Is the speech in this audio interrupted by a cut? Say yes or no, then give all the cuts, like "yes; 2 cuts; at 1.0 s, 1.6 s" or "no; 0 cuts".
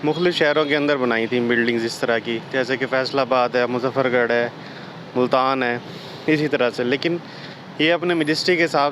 no; 0 cuts